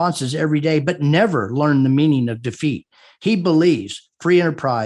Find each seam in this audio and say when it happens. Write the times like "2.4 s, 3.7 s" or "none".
none